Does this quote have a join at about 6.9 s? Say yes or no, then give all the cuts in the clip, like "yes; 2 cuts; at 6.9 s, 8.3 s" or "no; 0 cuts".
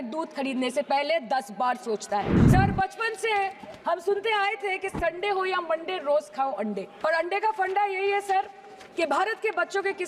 yes; 2 cuts; at 2.4 s, 6.9 s